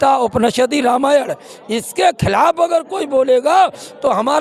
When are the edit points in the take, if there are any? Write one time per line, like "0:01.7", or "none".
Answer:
none